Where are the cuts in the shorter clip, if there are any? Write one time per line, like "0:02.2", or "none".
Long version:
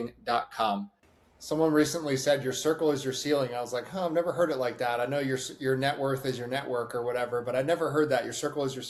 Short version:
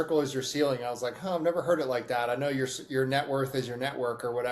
none